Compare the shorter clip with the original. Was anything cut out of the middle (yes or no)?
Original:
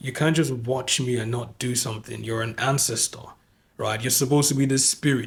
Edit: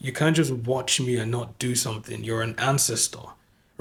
no